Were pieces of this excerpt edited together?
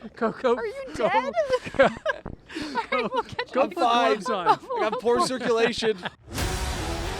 yes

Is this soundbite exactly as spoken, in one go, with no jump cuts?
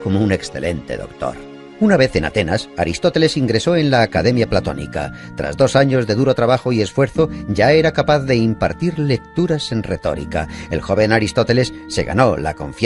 yes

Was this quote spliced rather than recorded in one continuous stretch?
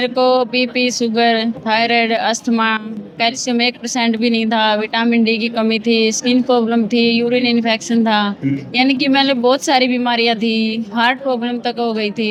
no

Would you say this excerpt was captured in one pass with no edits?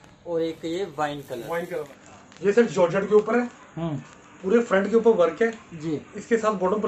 no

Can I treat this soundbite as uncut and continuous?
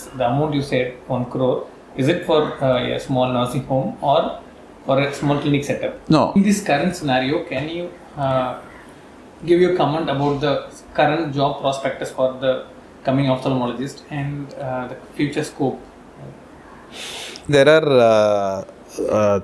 no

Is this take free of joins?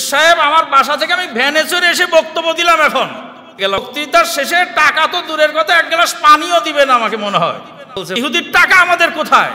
no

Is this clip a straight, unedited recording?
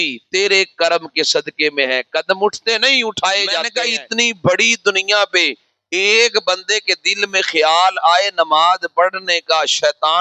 no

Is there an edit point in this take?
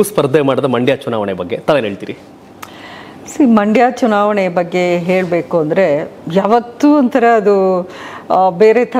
no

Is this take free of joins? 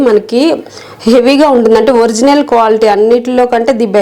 yes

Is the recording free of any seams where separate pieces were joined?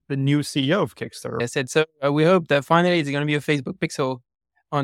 no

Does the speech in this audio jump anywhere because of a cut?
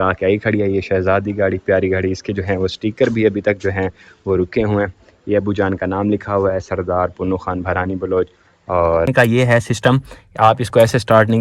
yes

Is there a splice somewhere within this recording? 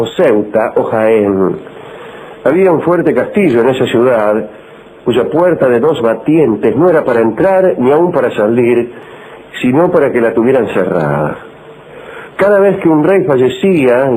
yes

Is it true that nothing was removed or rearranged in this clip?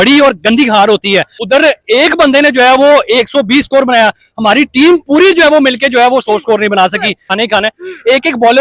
no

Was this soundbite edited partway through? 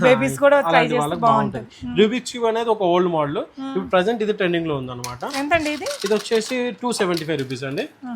no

